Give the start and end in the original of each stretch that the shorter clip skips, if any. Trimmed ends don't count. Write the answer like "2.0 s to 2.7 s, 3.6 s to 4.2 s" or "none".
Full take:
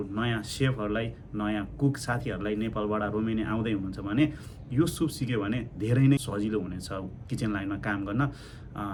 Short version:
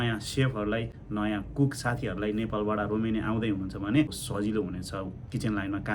4.5 s to 6.3 s